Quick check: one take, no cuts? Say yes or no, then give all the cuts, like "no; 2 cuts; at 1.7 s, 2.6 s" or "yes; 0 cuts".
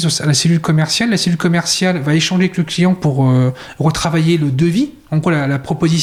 yes; 0 cuts